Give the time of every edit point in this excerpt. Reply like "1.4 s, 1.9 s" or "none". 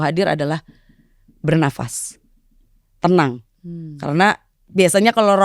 none